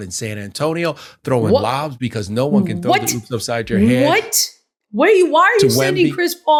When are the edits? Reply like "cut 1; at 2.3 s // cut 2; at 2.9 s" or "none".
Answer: none